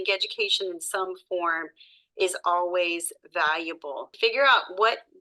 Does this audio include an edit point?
yes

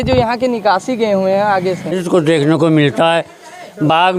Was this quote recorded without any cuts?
no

